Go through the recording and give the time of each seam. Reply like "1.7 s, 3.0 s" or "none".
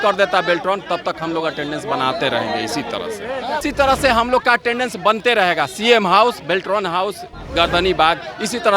3.6 s